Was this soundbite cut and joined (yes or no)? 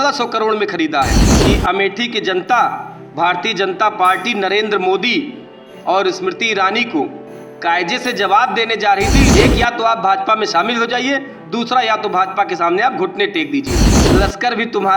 yes